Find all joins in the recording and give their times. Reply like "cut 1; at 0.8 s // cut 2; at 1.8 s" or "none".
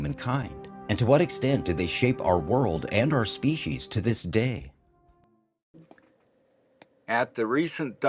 cut 1; at 7.2 s